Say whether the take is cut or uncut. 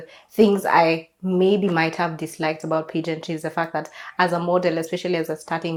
uncut